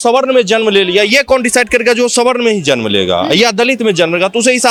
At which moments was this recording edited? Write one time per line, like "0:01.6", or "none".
none